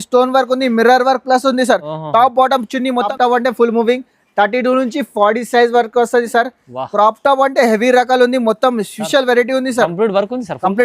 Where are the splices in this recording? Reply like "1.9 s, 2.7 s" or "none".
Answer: 3.1 s